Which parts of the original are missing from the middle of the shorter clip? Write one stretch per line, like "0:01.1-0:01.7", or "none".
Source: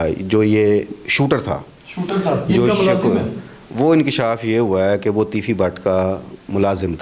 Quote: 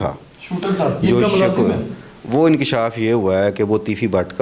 none

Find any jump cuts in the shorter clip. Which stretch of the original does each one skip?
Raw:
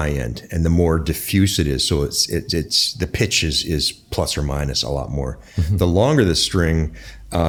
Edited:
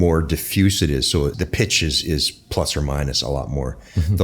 0:02.1-0:03.0

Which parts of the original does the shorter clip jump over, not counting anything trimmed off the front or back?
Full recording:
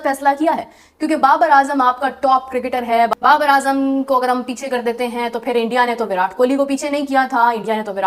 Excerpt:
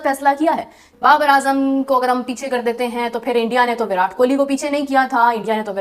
0:00.9-0:03.1

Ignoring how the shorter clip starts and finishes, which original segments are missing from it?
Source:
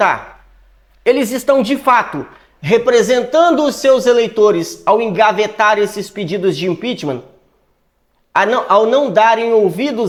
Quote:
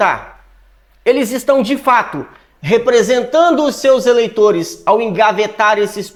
none

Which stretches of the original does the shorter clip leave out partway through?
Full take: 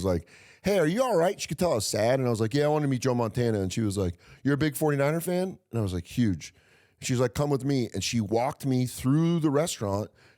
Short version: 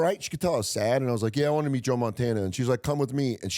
0:03.7-0:07.0

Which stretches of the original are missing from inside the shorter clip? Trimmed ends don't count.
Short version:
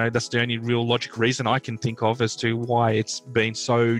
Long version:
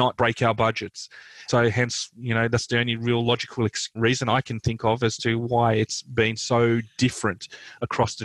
0:03.5-0:03.9

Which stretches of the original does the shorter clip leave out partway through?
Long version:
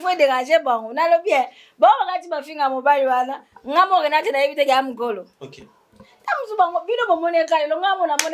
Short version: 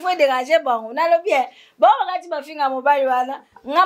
none

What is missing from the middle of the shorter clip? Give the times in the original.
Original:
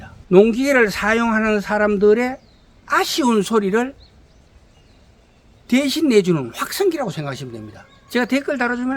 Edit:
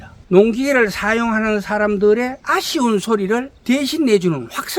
0:02.4-0:02.8
0:04.0-0:05.6

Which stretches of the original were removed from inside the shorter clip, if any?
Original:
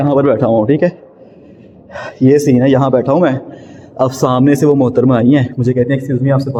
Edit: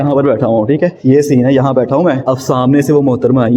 0:01.0-0:02.1
0:03.4-0:03.9

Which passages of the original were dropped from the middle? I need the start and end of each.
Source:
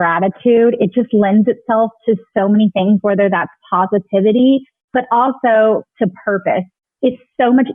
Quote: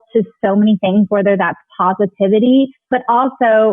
0:04.7-0:04.8

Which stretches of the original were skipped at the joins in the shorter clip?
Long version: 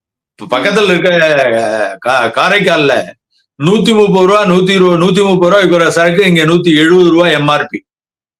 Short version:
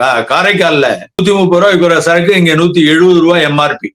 0:03.3-0:05.1

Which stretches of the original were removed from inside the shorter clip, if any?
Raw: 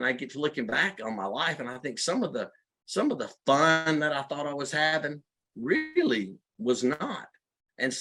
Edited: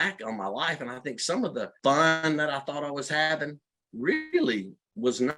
0:02.5-0:03.4

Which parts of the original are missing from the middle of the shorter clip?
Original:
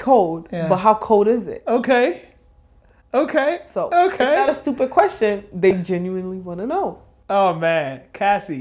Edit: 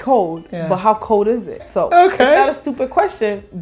0:01.6-0:03.6

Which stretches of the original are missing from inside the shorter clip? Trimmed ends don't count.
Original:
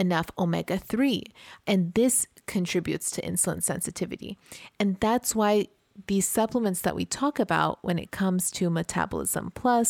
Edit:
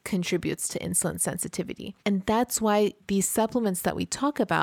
0:04.3-0:04.6
0:05.7-0:06.0

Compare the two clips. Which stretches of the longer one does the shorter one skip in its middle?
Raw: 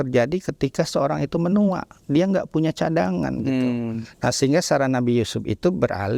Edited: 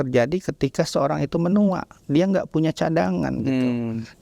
none

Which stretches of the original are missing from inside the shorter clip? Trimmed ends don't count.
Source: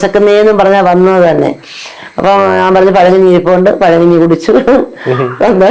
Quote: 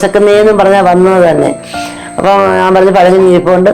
none

